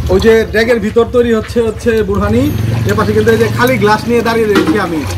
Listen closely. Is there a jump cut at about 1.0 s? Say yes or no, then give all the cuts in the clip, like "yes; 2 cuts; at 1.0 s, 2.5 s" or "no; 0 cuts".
no; 0 cuts